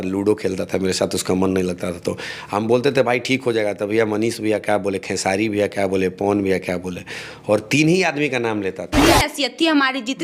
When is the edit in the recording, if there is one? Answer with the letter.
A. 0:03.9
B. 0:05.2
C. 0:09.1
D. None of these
C